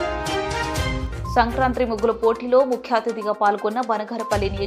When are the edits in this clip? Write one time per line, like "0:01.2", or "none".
none